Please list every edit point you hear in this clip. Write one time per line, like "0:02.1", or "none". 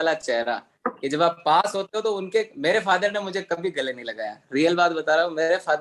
none

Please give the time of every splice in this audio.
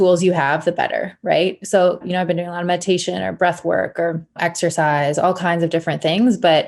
0:02.0
0:04.4

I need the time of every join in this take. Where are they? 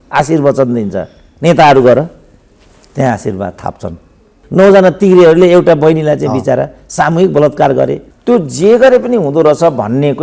0:04.4
0:08.1

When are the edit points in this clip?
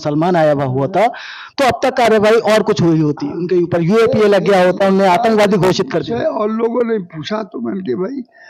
none

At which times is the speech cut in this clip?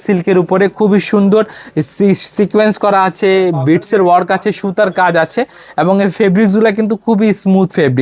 none

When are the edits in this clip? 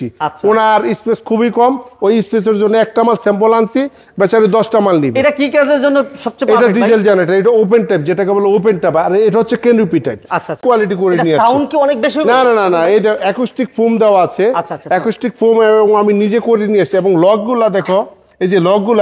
0:10.6

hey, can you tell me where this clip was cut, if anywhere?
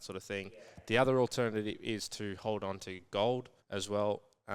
0:03.6

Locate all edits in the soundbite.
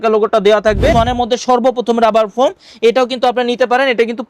0:00.9

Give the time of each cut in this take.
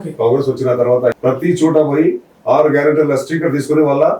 0:01.2

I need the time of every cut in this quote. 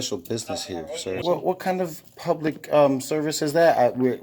0:01.2

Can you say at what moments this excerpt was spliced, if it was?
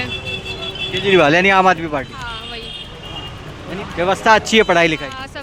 none

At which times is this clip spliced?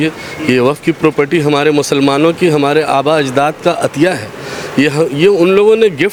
none

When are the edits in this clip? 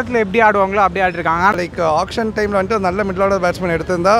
0:01.5

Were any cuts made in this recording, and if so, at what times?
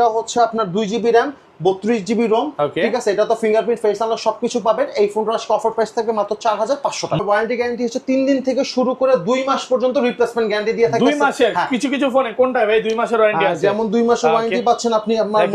0:07.2

